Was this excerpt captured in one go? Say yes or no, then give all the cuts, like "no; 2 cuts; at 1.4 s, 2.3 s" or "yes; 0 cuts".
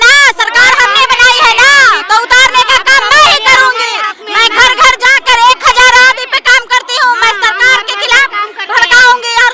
yes; 0 cuts